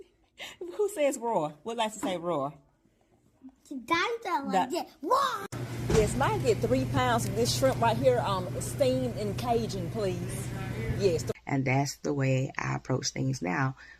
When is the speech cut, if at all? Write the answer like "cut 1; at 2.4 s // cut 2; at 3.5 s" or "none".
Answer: cut 1; at 5.4 s // cut 2; at 11.3 s